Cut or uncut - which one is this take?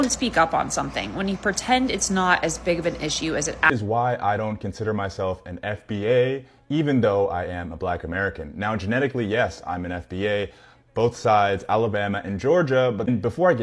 cut